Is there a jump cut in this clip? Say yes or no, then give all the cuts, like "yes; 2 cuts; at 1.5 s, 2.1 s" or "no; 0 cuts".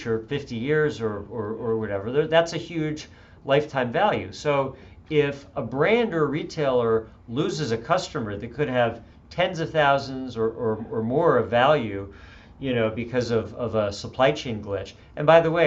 no; 0 cuts